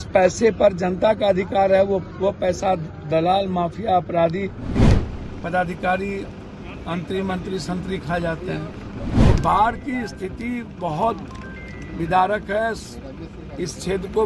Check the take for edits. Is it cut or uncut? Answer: cut